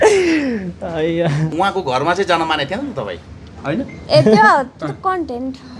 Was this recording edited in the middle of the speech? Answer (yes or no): yes